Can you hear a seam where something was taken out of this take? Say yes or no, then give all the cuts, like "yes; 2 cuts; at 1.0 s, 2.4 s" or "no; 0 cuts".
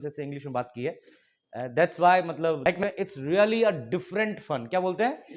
yes; 1 cut; at 2.8 s